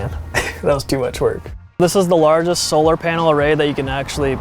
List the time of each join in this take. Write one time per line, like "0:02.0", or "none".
0:01.7